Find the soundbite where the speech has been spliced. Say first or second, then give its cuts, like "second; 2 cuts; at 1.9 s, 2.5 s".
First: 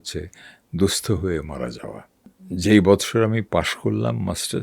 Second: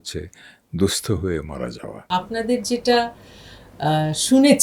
second; 1 cut; at 2.1 s